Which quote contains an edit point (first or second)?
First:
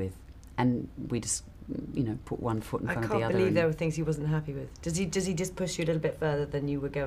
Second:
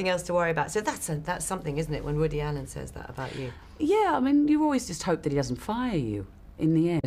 first